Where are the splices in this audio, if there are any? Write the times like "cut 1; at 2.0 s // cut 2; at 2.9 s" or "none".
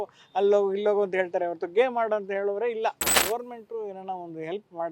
cut 1; at 3.1 s